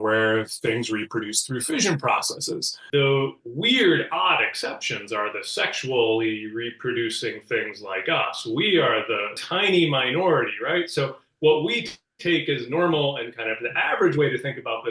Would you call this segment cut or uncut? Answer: cut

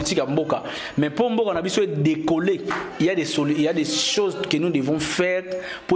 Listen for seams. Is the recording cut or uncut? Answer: uncut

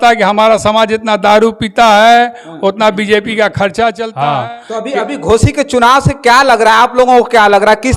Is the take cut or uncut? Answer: cut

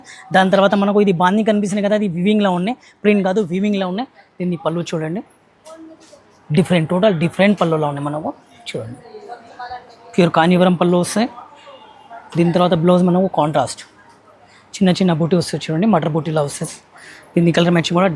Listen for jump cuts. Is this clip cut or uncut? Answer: uncut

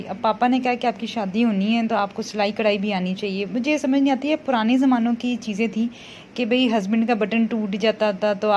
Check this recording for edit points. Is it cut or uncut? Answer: uncut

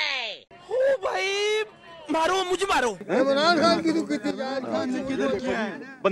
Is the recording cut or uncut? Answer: uncut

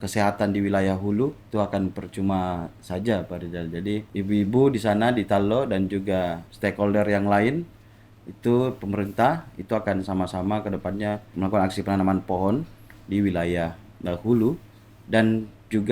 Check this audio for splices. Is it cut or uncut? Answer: cut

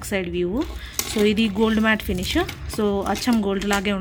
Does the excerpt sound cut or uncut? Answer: uncut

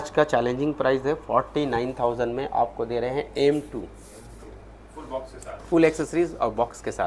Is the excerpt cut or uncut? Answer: uncut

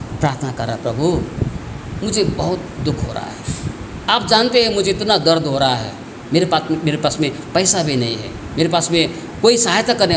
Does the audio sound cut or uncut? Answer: uncut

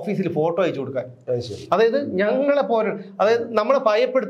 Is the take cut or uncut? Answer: uncut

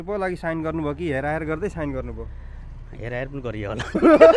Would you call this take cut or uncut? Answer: uncut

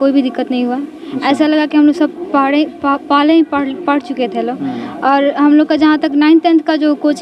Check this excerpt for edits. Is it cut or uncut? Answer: uncut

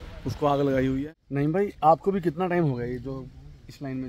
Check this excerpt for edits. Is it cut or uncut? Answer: cut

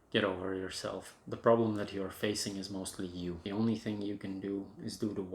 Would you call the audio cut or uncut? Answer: cut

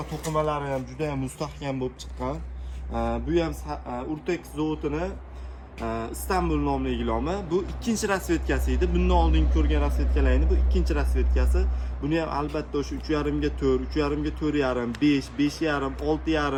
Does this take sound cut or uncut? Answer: uncut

